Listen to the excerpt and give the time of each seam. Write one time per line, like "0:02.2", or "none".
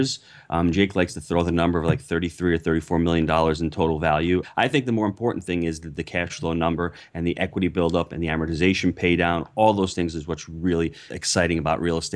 0:04.5
0:11.2